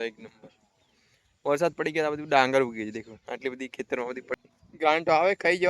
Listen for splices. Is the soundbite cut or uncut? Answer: cut